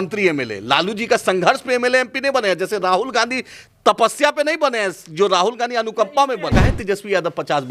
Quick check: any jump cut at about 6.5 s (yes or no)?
yes